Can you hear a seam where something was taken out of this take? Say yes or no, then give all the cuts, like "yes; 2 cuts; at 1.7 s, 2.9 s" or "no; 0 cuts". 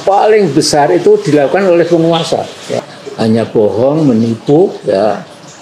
yes; 1 cut; at 2.8 s